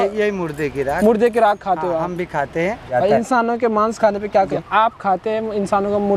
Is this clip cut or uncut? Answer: cut